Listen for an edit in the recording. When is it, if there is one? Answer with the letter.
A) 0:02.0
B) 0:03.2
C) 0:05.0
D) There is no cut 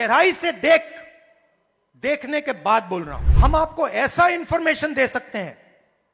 B